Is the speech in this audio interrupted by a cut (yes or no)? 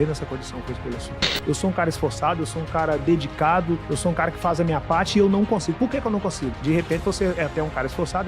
yes